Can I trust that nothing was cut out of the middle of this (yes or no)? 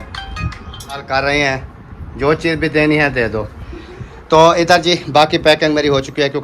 no